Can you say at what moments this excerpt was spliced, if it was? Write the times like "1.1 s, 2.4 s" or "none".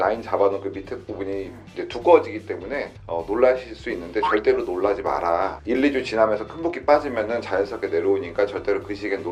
none